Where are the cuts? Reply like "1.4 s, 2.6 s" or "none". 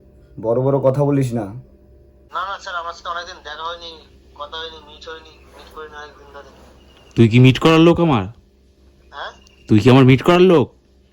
2.2 s